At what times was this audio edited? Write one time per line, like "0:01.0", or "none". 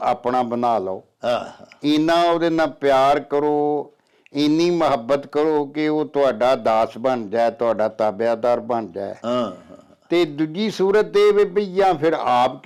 none